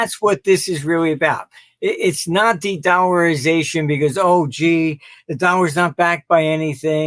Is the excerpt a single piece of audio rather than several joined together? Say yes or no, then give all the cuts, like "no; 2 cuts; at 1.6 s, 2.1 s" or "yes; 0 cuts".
yes; 0 cuts